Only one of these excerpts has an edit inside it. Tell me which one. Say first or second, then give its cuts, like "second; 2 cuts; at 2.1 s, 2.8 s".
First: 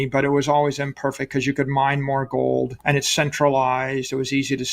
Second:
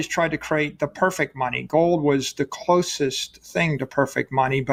first; 1 cut; at 2.8 s